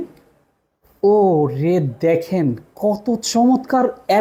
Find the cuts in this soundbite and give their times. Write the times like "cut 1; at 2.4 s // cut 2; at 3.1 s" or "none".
none